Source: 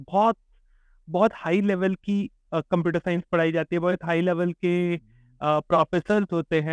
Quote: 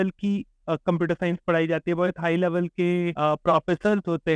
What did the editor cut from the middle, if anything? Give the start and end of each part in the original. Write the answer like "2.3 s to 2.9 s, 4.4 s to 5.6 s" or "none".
5.0 s to 5.4 s